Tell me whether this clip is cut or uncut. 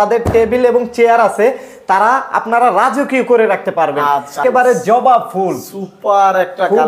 cut